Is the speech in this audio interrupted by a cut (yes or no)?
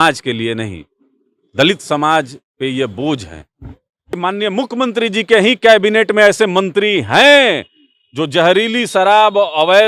yes